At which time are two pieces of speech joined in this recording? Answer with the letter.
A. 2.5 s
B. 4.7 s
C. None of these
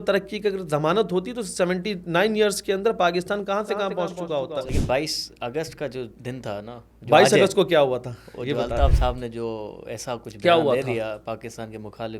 B